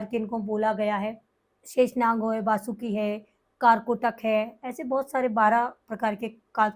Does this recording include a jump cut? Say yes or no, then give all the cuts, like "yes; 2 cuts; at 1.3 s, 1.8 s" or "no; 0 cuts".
no; 0 cuts